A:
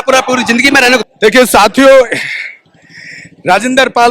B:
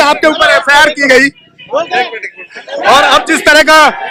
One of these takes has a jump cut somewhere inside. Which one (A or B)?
A